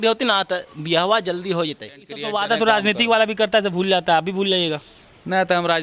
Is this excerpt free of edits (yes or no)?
no